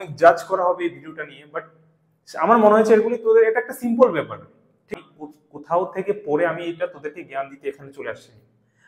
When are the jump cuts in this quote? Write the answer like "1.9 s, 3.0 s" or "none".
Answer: 4.9 s